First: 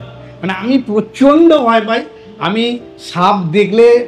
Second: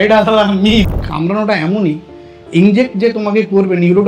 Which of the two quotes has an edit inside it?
second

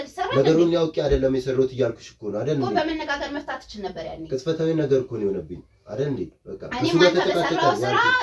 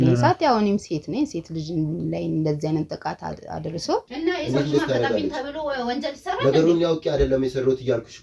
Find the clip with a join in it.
second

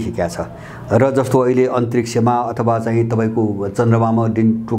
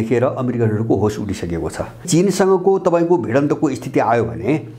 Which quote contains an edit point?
second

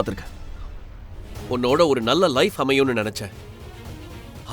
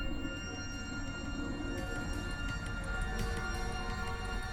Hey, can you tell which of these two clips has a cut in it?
first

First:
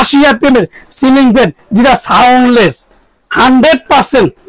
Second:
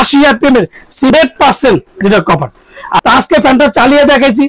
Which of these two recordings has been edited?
second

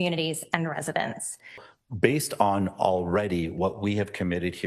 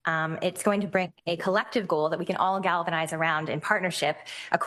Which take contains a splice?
first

